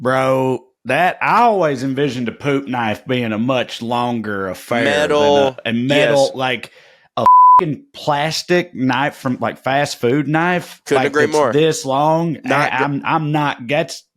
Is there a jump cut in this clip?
no; 0 cuts

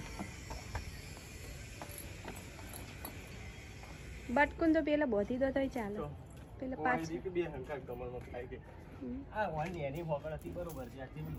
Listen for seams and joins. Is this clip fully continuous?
yes; 0 cuts

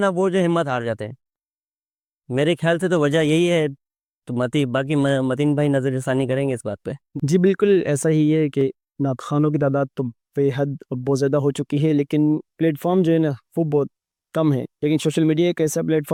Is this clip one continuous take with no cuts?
yes; 0 cuts

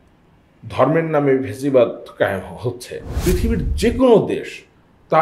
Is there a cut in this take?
yes; 1 cut; at 3.2 s

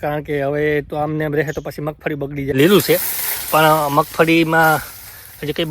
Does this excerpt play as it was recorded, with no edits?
no; 1 cut; at 2.5 s

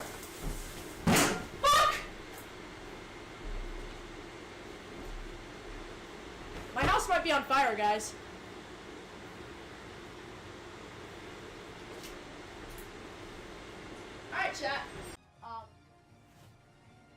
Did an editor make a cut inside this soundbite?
yes; 1 cut; at 5.3 s

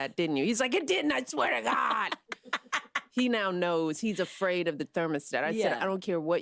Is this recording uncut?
yes; 0 cuts

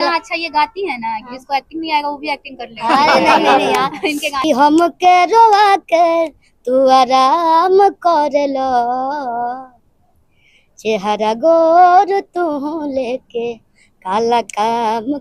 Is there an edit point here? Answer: yes; 1 cut; at 4.3 s

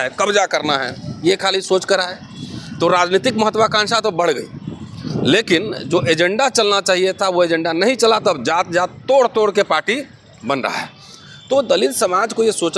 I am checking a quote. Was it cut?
no; 0 cuts

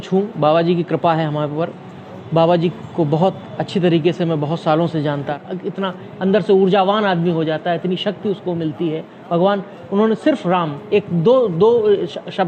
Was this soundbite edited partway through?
yes; 1 cut; at 5.4 s

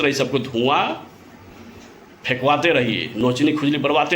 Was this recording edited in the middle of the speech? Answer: yes; 1 cut; at 3.1 s

